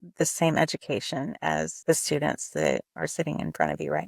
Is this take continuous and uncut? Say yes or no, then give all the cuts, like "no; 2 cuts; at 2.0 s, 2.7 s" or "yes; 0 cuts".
no; 2 cuts; at 1.7 s, 2.9 s